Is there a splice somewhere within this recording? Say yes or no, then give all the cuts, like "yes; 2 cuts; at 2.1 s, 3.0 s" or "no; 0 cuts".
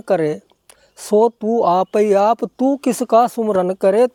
no; 0 cuts